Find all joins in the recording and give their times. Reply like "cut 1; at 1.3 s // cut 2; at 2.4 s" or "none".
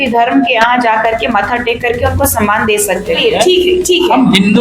cut 1; at 3.2 s